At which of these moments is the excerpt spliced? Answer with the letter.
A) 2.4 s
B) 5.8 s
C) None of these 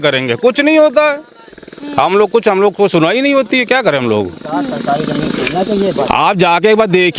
C